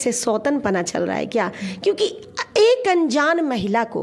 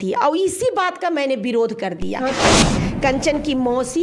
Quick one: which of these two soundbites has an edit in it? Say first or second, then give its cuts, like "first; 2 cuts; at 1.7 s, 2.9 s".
second; 1 cut; at 2.6 s